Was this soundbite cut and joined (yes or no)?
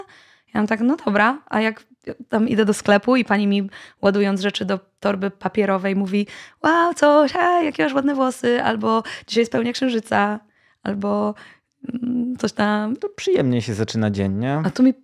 no